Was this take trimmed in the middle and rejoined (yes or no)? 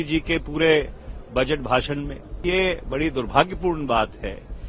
yes